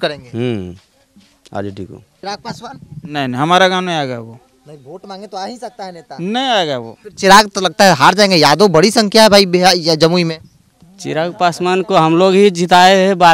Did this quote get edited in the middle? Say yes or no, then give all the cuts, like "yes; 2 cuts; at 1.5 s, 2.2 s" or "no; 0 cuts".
yes; 2 cuts; at 2.1 s, 7.0 s